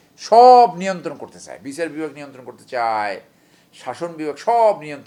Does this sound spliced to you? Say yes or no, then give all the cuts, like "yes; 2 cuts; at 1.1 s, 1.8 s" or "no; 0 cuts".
no; 0 cuts